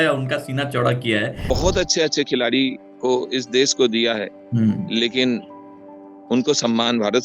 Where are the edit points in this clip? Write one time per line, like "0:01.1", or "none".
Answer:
0:01.3